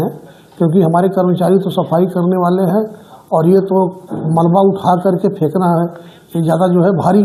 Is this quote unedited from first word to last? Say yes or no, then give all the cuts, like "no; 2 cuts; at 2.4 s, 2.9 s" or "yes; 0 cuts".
yes; 0 cuts